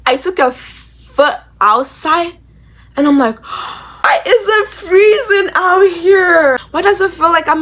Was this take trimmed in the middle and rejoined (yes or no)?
yes